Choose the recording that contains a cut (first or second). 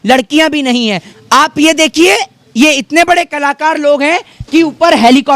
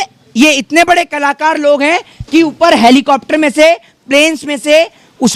first